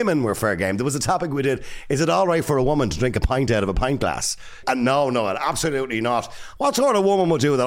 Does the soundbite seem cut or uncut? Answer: cut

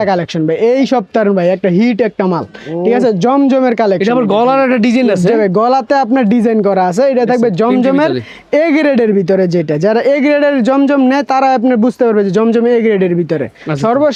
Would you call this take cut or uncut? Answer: uncut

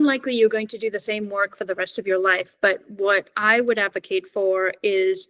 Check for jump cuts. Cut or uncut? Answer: uncut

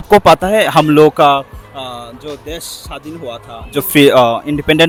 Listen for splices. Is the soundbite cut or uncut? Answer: uncut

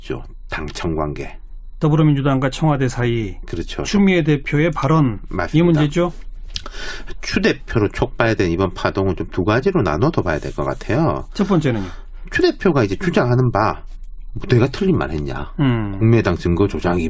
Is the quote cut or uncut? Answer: cut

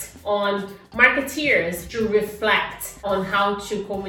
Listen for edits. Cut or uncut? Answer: cut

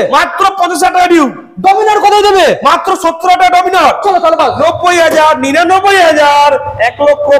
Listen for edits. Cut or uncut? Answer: cut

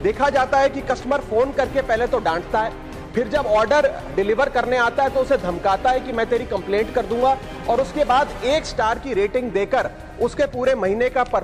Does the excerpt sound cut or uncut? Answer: uncut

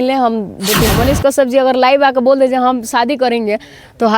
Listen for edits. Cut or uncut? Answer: cut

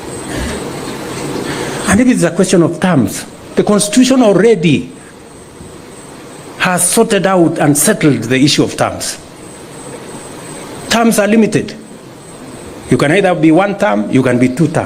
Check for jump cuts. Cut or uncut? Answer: uncut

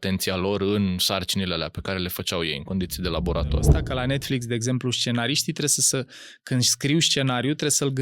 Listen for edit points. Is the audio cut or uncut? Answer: cut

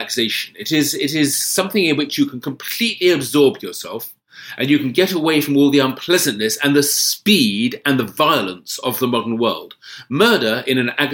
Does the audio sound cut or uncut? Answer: uncut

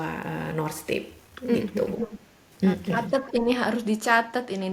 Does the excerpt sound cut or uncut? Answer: uncut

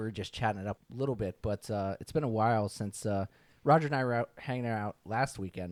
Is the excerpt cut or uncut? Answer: uncut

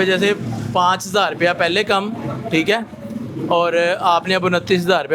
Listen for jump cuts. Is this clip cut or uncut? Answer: uncut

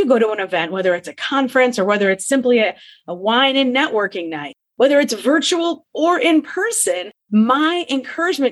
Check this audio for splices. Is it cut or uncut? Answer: uncut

